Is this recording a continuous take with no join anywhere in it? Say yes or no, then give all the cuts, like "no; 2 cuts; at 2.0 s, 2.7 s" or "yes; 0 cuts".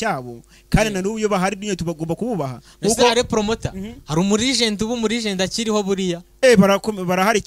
yes; 0 cuts